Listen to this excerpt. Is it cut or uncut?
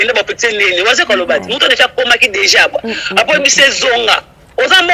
uncut